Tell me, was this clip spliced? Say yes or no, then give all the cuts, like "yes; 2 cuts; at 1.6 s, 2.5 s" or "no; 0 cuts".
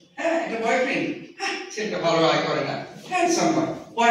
no; 0 cuts